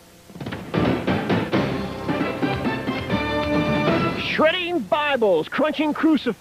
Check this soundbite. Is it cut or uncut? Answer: uncut